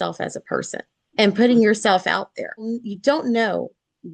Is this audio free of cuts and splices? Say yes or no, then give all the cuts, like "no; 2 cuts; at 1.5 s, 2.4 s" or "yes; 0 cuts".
no; 2 cuts; at 1.0 s, 2.8 s